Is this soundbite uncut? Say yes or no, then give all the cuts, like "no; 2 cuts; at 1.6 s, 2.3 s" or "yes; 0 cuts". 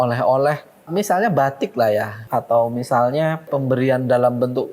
no; 3 cuts; at 0.9 s, 2.2 s, 3.5 s